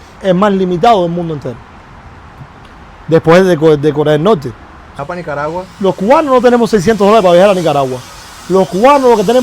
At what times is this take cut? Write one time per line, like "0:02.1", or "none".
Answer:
0:04.9